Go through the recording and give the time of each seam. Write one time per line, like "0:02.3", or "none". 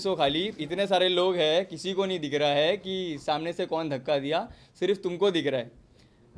none

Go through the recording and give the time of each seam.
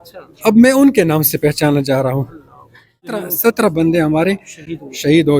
0:03.2

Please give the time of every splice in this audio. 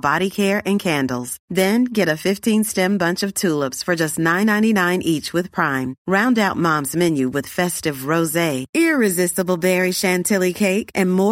none

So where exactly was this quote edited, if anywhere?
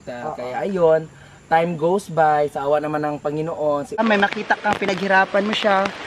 0:04.0

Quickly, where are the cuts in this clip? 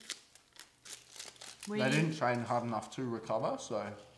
none

